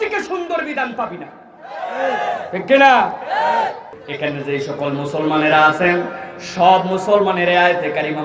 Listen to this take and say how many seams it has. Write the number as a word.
one